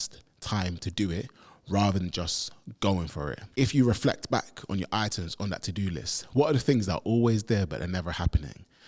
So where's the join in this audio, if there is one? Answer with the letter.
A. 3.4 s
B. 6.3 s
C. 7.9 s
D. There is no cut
A